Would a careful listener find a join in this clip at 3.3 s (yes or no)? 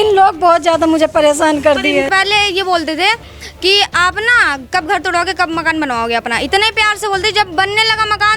no